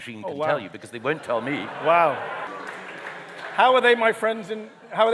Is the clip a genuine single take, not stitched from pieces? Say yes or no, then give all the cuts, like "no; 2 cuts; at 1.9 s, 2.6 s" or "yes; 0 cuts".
no; 1 cut; at 2.5 s